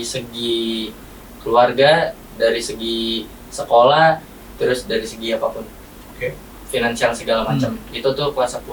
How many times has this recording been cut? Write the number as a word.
zero